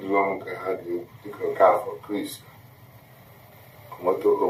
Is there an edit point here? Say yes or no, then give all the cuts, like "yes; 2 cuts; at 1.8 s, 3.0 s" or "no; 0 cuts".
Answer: no; 0 cuts